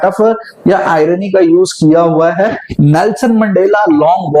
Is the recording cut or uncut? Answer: cut